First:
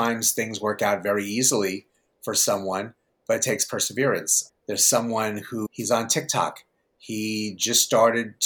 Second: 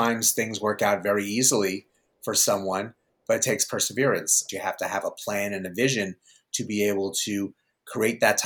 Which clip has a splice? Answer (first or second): second